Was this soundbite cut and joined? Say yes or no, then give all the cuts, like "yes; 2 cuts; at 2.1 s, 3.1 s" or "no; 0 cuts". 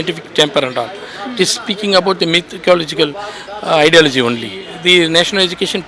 yes; 1 cut; at 4.6 s